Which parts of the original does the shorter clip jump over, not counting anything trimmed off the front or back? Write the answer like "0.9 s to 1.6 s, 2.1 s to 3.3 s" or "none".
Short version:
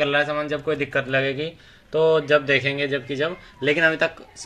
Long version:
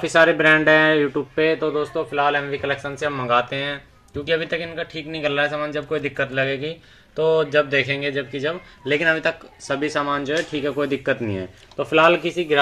none